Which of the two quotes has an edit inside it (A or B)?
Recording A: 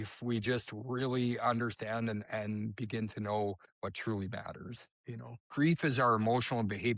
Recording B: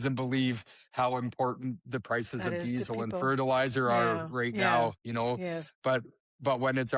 A